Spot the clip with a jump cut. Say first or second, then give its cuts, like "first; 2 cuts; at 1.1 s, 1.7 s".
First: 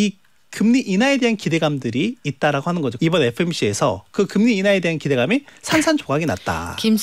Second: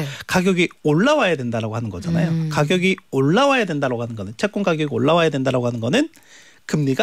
first; 1 cut; at 2.9 s